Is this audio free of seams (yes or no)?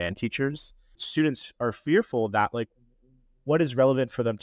no